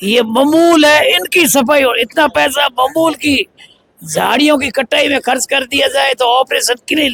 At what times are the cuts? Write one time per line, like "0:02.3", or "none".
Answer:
none